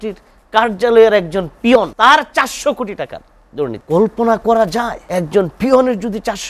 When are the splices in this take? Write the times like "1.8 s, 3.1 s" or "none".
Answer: 1.9 s, 3.8 s, 5.0 s